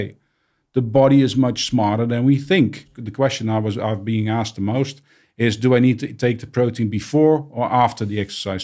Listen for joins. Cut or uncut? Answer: cut